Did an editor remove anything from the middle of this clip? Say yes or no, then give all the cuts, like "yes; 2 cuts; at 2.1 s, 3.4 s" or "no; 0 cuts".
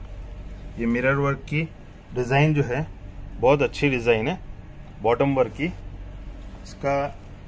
no; 0 cuts